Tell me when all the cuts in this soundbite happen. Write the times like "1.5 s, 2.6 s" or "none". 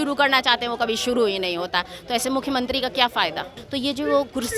3.6 s

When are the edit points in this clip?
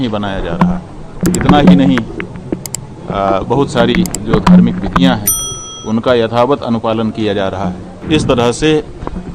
1.2 s, 7.9 s

